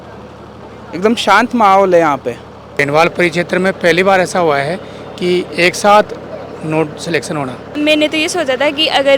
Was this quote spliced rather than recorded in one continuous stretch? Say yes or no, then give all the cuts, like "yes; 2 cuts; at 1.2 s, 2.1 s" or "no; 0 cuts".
yes; 2 cuts; at 2.8 s, 7.8 s